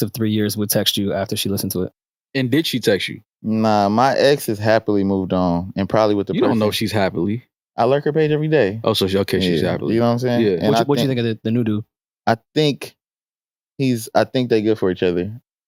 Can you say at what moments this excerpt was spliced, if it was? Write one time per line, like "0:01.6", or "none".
none